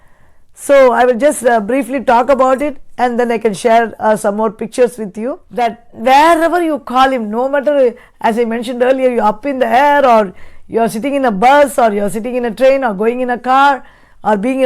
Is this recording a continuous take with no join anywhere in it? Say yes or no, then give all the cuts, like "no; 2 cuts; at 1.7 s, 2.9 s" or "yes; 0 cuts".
no; 1 cut; at 5.4 s